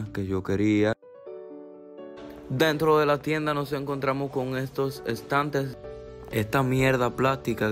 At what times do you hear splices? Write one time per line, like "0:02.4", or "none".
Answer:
0:01.0
0:05.7